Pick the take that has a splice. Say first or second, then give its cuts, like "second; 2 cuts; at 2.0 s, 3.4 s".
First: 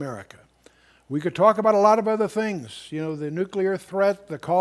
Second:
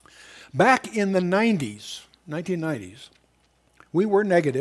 first; 1 cut; at 1.1 s